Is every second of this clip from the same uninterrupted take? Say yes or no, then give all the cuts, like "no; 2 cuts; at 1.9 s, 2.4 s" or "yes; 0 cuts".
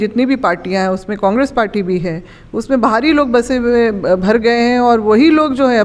yes; 0 cuts